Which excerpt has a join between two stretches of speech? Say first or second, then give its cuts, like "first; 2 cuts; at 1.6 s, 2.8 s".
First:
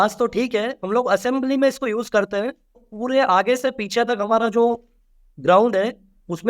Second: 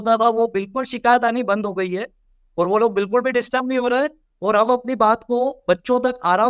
first; 1 cut; at 2.9 s